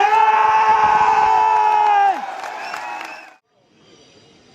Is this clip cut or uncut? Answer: cut